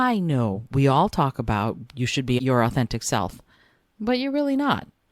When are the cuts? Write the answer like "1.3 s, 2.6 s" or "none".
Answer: 2.4 s